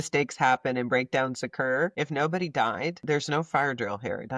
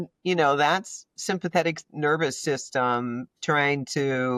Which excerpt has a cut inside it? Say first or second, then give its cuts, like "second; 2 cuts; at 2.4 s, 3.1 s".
first; 2 cuts; at 1.9 s, 3.0 s